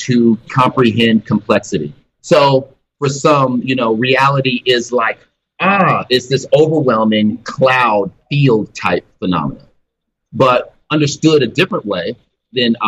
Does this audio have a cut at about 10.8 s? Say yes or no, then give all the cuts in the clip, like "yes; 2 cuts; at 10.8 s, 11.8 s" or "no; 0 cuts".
yes; 3 cuts; at 2.1 s, 2.8 s, 10.8 s